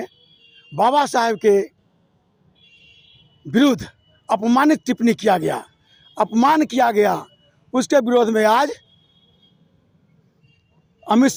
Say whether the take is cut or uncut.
uncut